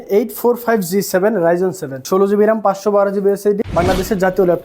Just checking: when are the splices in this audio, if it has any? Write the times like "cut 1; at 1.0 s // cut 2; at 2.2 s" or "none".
cut 1; at 1.9 s // cut 2; at 3.6 s

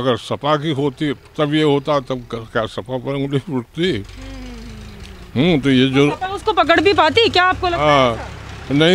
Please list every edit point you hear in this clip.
none

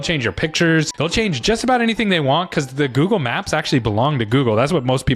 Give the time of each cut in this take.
cut 1; at 0.9 s

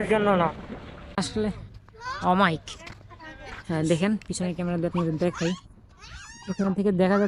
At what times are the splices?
cut 1; at 1.2 s

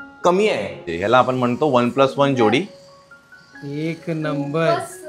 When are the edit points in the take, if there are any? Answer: cut 1; at 0.9 s

